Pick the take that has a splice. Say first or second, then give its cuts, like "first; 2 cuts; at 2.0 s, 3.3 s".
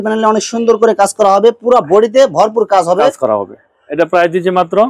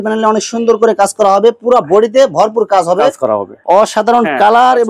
second; 1 cut; at 3.6 s